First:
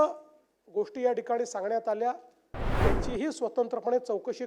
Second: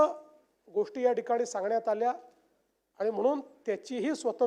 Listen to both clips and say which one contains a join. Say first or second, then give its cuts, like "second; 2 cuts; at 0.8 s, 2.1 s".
first; 1 cut; at 2.7 s